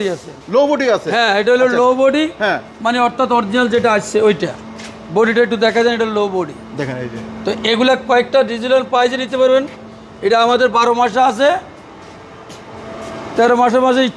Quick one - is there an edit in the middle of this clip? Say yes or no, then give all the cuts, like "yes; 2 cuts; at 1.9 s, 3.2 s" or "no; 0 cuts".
no; 0 cuts